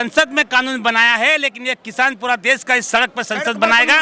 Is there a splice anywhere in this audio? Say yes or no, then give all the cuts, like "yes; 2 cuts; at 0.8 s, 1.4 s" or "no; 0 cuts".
no; 0 cuts